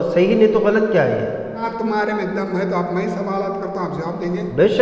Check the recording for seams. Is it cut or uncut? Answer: cut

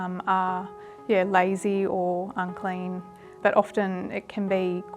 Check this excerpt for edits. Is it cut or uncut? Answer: cut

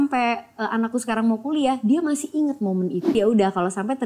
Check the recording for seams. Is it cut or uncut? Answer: cut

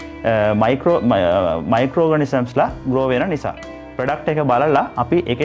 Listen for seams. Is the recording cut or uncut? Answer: cut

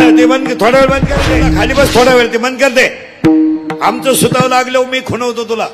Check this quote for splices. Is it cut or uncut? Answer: cut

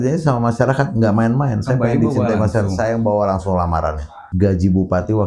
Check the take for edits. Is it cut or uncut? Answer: cut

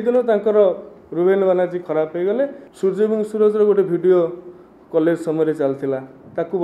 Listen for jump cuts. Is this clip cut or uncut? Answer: cut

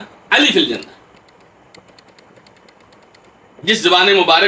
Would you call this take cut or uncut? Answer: uncut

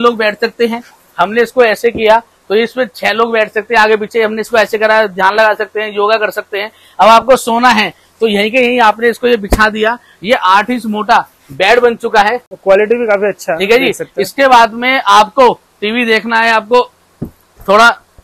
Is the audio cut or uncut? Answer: uncut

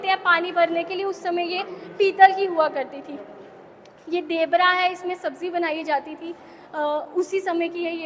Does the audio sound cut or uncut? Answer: uncut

